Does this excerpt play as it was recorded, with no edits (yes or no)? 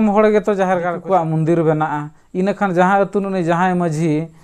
no